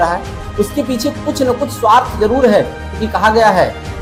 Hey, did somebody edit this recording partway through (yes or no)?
no